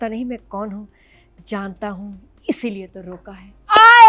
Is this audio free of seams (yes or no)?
yes